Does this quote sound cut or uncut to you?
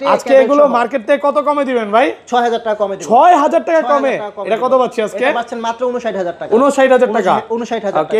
uncut